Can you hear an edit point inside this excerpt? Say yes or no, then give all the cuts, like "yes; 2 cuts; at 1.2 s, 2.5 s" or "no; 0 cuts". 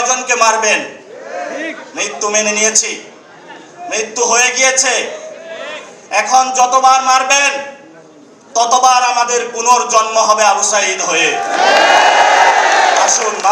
no; 0 cuts